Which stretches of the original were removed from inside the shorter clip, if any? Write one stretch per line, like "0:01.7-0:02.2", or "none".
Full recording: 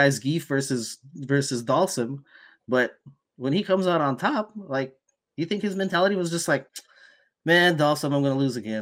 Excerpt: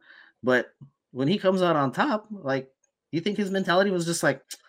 none